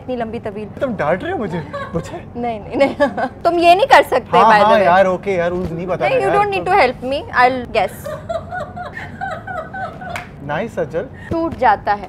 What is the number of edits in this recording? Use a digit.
6